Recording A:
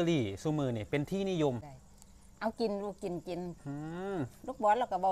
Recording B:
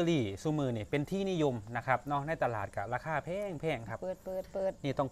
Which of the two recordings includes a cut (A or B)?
A